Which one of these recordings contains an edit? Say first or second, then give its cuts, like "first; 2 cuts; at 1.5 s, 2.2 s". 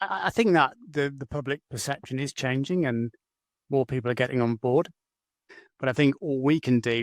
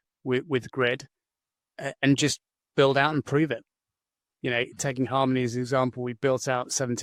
first; 1 cut; at 5.5 s